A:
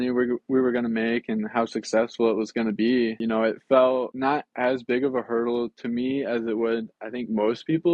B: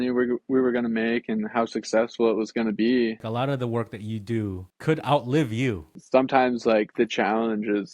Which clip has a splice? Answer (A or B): B